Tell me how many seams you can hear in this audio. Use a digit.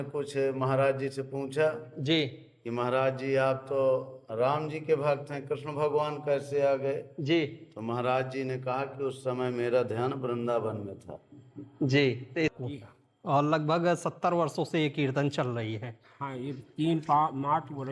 1